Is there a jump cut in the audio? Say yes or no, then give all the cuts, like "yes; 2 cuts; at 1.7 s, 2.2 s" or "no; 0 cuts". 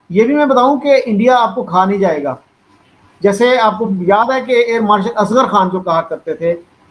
no; 0 cuts